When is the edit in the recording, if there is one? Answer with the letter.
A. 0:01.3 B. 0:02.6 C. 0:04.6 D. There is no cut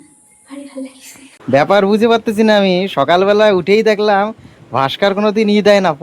A